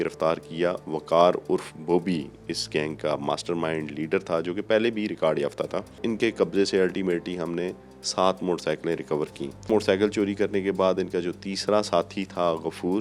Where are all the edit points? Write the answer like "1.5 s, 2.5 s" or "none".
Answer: 6.0 s, 9.7 s